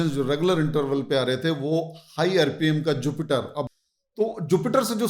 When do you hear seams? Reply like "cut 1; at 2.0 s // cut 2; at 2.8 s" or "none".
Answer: cut 1; at 3.8 s